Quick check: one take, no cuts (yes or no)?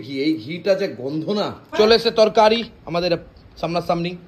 no